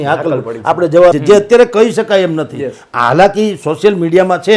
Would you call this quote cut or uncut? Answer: cut